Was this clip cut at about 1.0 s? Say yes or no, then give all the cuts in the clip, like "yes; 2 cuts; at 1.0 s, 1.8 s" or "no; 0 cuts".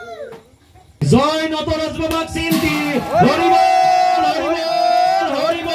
yes; 1 cut; at 1.0 s